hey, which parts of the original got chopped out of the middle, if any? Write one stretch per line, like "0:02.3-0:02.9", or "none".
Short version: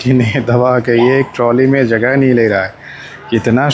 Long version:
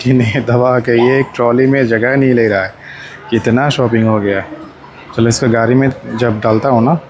none